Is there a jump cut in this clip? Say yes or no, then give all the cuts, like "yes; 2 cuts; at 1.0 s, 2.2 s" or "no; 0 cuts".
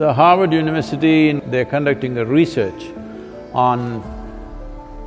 yes; 1 cut; at 1.4 s